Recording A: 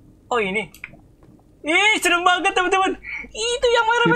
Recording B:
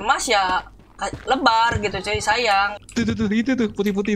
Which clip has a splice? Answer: B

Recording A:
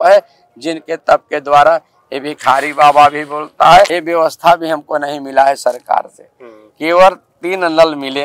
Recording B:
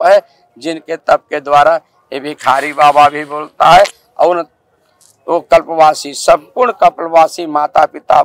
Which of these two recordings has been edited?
A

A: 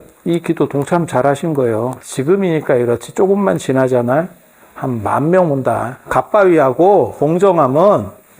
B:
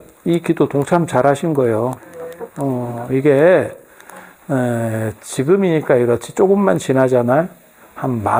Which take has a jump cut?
A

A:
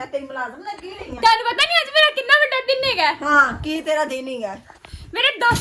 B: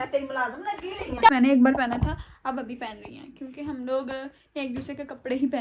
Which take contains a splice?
B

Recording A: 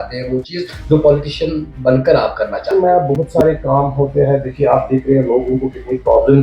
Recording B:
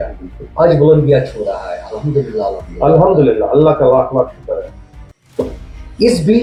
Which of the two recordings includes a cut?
A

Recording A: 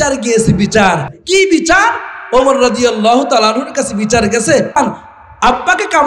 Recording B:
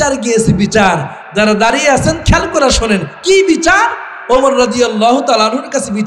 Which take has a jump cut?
A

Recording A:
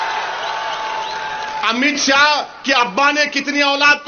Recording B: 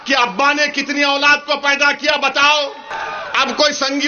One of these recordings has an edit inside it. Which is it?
B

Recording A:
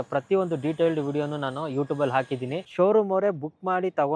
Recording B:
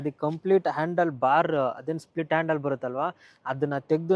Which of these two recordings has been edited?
A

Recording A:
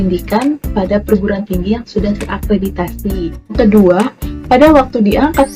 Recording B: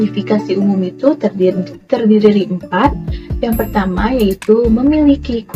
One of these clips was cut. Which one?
A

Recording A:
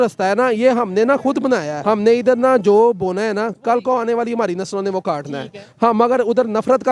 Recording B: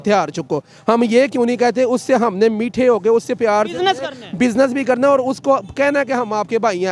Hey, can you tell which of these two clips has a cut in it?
A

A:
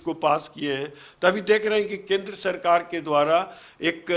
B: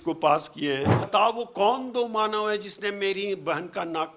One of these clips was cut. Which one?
B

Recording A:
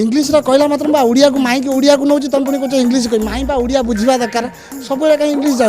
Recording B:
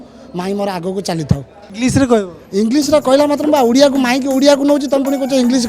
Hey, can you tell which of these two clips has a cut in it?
B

